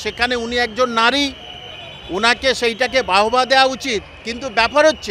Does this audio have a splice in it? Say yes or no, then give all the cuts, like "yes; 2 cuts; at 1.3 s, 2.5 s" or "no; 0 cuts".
no; 0 cuts